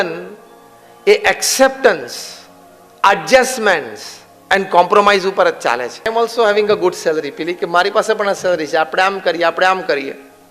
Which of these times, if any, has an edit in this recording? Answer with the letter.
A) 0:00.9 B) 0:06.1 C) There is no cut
B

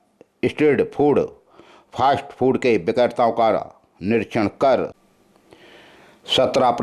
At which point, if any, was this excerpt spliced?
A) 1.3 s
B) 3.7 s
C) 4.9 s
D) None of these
C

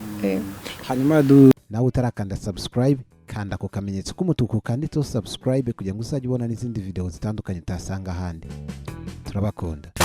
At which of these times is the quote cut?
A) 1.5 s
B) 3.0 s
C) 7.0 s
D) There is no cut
A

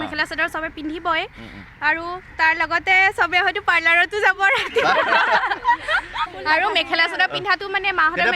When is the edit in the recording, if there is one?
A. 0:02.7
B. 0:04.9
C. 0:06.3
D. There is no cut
C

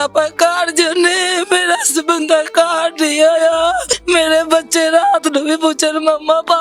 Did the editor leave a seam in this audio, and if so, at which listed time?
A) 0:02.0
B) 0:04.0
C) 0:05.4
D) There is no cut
B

